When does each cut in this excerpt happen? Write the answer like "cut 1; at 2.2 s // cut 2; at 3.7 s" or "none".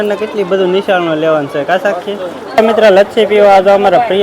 cut 1; at 2.6 s